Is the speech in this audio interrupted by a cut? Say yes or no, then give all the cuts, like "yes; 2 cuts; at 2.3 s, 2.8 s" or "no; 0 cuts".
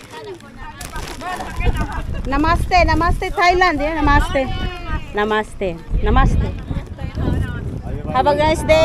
no; 0 cuts